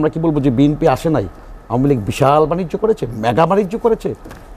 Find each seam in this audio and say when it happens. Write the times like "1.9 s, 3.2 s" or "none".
none